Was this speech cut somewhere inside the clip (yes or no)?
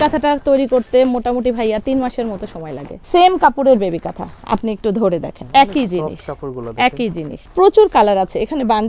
yes